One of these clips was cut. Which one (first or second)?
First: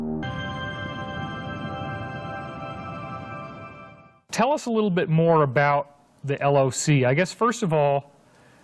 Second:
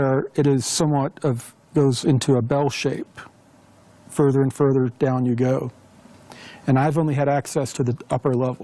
first